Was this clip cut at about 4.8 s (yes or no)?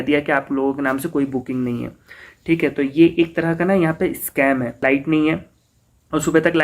yes